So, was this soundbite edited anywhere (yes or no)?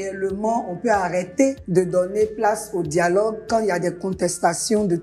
yes